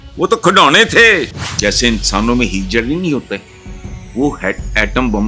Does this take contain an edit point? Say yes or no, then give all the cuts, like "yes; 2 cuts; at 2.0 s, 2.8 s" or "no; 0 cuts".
yes; 1 cut; at 1.4 s